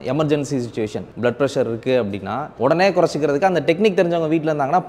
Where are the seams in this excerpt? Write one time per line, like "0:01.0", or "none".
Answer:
0:01.0
0:02.5

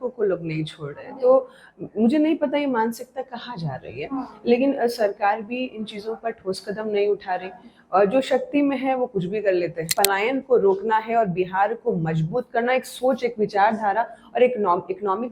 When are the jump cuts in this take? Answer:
0:09.9

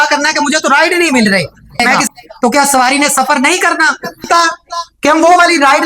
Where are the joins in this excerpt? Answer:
0:01.8
0:04.3

